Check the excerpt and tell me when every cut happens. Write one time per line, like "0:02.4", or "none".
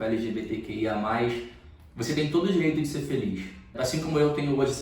0:03.7